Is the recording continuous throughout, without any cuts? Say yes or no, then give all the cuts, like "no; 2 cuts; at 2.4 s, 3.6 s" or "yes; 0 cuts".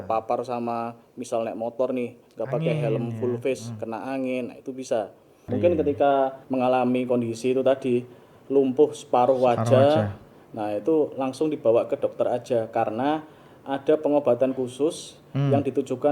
no; 2 cuts; at 5.5 s, 6.4 s